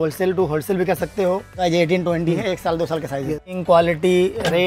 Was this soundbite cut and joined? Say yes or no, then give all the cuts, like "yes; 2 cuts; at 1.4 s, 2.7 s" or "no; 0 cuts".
yes; 2 cuts; at 1.7 s, 3.5 s